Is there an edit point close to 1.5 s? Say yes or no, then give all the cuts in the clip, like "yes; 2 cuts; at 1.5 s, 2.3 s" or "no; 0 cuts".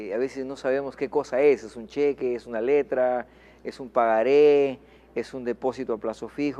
yes; 1 cut; at 1.5 s